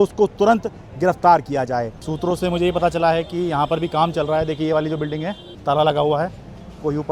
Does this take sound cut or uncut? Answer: cut